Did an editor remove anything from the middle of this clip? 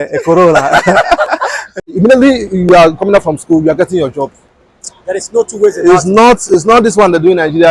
yes; 1 cut; at 1.6 s

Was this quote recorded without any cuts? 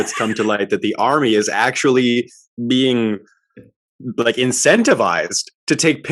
yes; 0 cuts

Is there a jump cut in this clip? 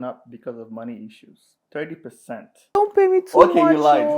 yes; 1 cut; at 2.7 s

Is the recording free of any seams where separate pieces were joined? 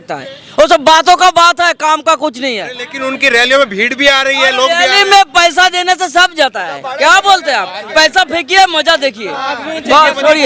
yes; 0 cuts

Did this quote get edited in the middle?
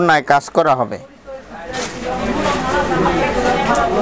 no; 0 cuts

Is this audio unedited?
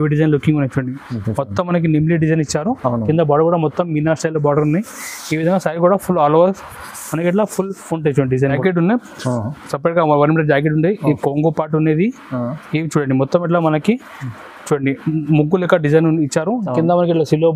no; 1 cut; at 8.6 s

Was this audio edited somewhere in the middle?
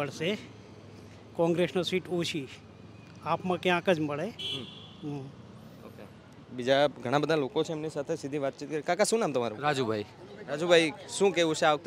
no; 0 cuts

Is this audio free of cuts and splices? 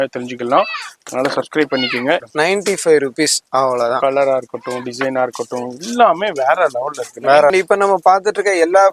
no; 2 cuts; at 2.3 s, 7.5 s

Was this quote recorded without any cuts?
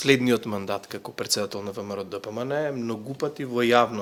yes; 0 cuts

